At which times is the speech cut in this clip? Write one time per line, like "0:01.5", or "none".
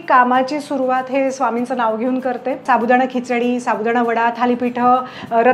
0:02.6

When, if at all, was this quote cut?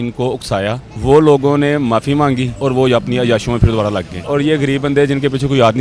0:00.9
0:02.5
0:04.2

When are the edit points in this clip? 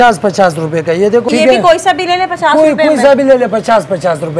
0:01.3

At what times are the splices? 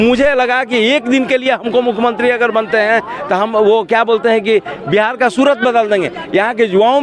none

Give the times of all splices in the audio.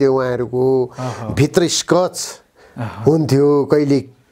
none

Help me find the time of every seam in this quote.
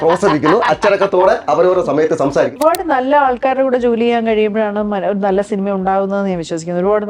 0:02.6

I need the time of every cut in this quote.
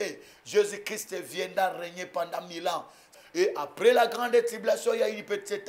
0:03.2

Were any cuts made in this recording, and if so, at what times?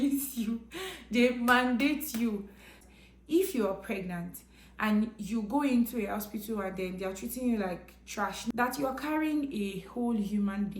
0:02.8
0:08.4

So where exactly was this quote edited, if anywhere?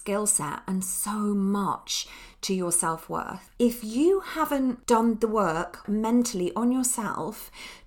0:03.4
0:04.8
0:05.8

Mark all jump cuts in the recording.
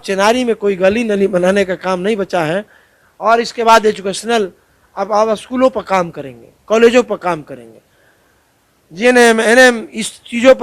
none

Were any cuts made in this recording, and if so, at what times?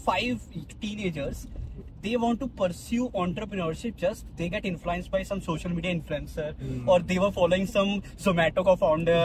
none

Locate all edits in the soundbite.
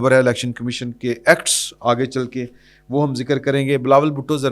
none

